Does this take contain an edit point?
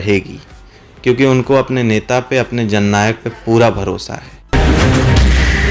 yes; 1 cut; at 4.3 s

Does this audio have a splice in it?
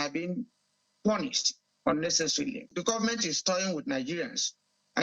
yes; 1 cut; at 2.7 s

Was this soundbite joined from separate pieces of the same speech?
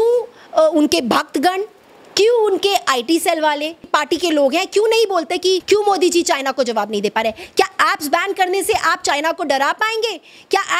yes; 2 cuts; at 3.9 s, 5.6 s

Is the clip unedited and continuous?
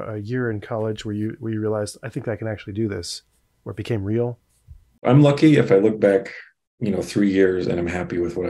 no; 1 cut; at 5.0 s

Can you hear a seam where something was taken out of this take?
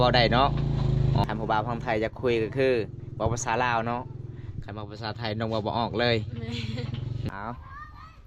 yes; 2 cuts; at 1.2 s, 7.3 s

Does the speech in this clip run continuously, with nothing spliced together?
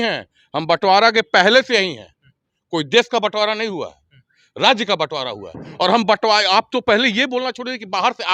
yes; 0 cuts

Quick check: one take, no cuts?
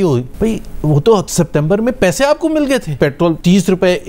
no; 1 cut; at 2.9 s

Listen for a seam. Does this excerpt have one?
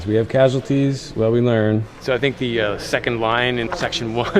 yes; 1 cut; at 2.0 s

